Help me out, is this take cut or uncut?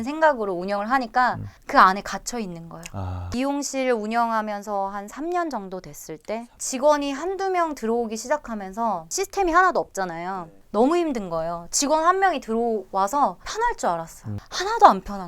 cut